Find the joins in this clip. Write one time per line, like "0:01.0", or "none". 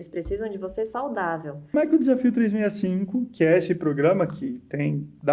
0:01.7